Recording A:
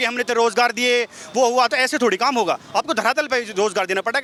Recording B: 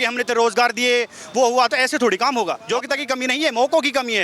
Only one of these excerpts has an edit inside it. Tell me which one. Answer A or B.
B